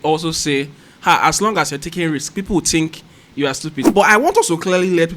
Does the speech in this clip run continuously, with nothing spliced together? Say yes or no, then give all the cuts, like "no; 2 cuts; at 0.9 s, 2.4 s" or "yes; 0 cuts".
no; 1 cut; at 3.7 s